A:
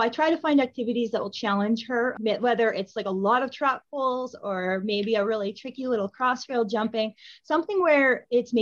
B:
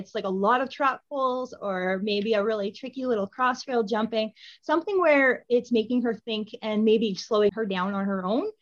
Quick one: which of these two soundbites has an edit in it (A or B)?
B